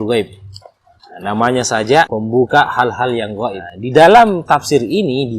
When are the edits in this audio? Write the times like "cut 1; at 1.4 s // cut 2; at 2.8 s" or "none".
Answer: cut 1; at 3.7 s